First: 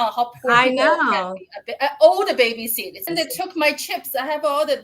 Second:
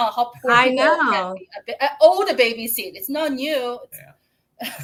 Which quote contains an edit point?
first; 1 cut; at 3.1 s

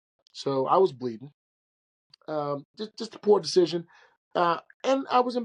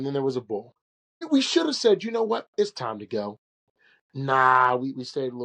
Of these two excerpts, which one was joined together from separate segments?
second; 1 cut; at 1.3 s

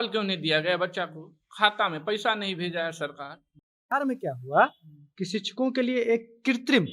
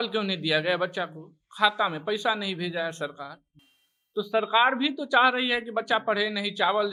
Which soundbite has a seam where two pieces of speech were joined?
first; 1 cut; at 3.7 s

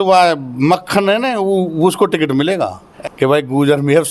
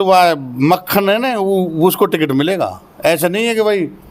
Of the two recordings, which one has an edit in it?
first; 1 cut; at 2.8 s

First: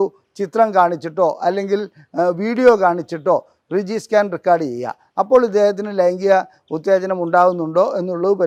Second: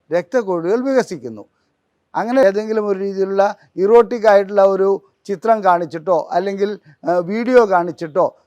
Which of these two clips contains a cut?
second; 1 cut; at 2.4 s

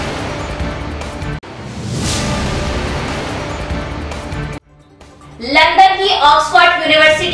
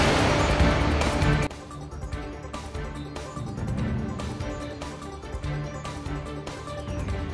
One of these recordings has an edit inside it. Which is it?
second; 1 cut; at 1.3 s

